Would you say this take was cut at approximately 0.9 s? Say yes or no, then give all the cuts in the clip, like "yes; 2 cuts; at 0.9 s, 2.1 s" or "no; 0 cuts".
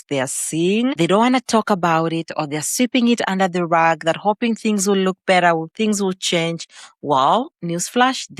yes; 1 cut; at 0.9 s